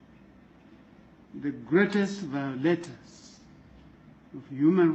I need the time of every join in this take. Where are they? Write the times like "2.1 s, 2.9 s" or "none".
none